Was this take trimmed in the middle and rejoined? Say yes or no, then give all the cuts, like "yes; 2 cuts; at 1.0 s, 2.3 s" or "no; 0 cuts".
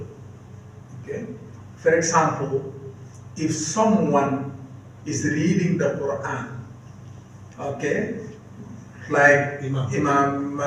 no; 0 cuts